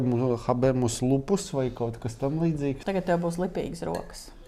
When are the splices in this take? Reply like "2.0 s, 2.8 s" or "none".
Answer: 2.8 s